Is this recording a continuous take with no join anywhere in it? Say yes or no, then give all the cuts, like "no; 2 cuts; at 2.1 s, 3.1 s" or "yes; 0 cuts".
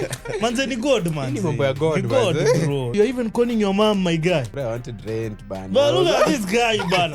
no; 2 cuts; at 2.9 s, 4.5 s